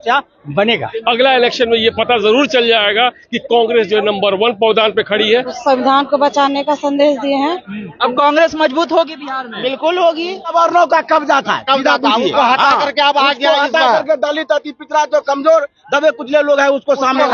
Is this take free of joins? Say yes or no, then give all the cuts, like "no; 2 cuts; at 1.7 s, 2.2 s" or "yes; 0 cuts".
no; 4 cuts; at 0.9 s, 5.5 s, 7.9 s, 10.5 s